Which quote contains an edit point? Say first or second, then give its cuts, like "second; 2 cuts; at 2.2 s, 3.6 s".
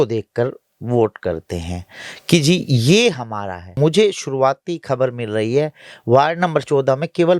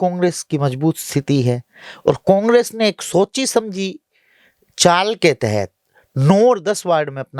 first; 1 cut; at 3.6 s